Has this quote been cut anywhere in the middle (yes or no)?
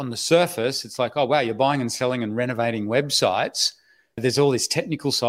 yes